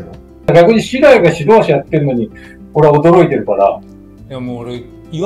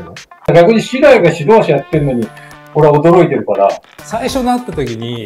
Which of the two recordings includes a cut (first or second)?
second